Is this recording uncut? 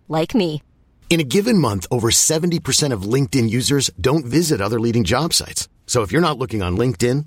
yes; 0 cuts

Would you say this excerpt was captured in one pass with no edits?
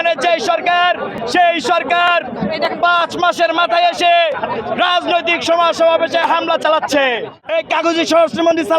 no; 2 cuts; at 1.1 s, 7.4 s

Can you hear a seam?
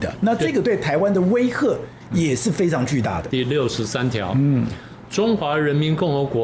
yes; 1 cut; at 3.2 s

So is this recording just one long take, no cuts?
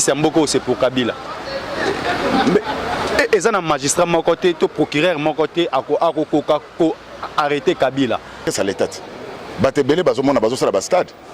no; 1 cut; at 8.5 s

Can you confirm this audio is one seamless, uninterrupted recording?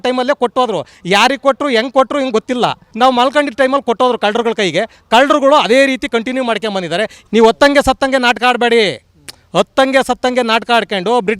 no; 2 cuts; at 2.8 s, 7.2 s

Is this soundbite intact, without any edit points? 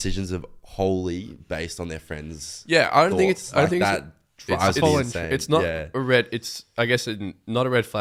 yes; 0 cuts

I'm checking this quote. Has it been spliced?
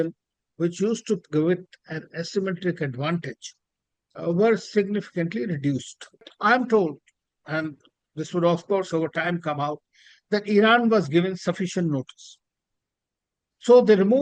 yes; 1 cut; at 6.3 s

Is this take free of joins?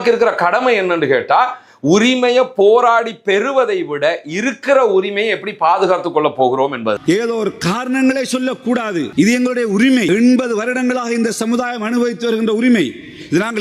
no; 3 cuts; at 7.0 s, 9.1 s, 10.1 s

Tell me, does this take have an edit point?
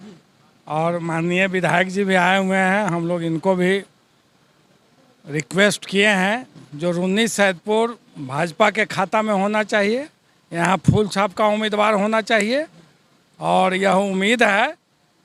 no; 0 cuts

